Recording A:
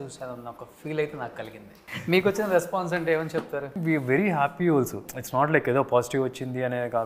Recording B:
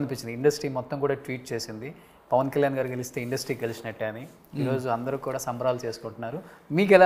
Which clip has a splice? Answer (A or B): A